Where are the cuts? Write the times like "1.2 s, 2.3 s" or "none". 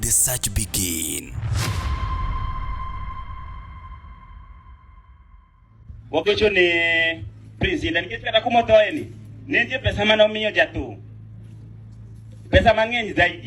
5.5 s